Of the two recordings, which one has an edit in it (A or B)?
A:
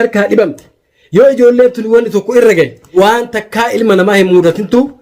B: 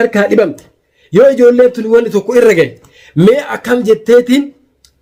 A